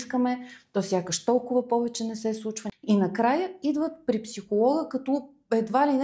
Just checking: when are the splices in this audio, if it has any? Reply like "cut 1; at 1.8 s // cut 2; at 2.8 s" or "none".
cut 1; at 2.6 s